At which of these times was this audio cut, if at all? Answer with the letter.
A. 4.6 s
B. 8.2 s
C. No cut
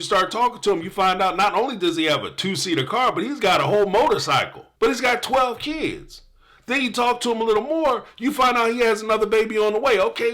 A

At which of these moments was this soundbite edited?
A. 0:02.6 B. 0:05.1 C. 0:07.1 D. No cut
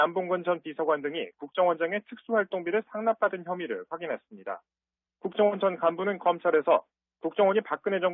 A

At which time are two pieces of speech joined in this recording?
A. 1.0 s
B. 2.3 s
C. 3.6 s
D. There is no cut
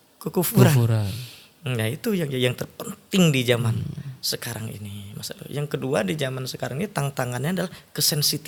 D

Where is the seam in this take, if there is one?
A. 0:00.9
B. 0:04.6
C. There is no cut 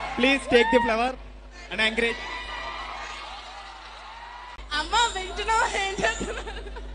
B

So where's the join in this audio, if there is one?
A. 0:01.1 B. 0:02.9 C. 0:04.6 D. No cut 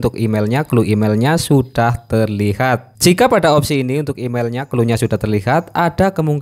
B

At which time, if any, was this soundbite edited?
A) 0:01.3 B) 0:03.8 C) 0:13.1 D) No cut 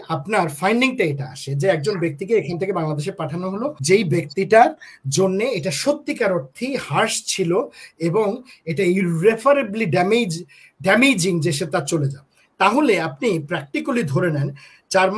B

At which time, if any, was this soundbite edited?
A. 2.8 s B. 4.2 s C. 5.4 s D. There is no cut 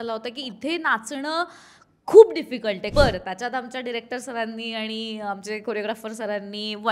A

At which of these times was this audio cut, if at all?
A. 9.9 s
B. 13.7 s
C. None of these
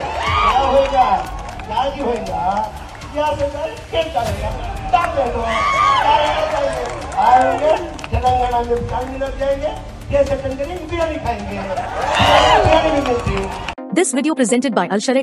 B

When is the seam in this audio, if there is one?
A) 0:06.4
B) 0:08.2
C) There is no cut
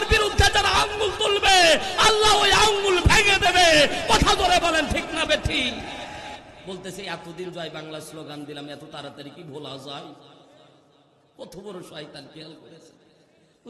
A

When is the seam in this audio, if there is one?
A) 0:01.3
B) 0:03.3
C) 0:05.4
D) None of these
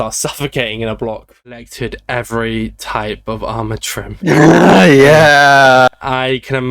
A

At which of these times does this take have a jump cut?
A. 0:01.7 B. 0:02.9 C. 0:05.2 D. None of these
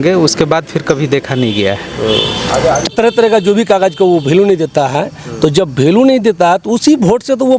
B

